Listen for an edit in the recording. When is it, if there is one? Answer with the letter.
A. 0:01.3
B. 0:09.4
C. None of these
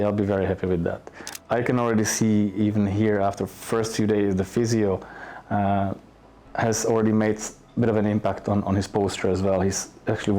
A